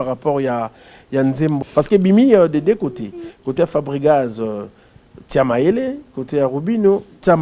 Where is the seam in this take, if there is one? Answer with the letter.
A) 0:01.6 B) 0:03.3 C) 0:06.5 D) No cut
A